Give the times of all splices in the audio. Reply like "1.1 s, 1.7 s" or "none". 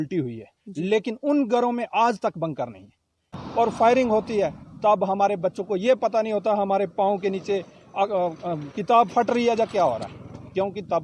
3.4 s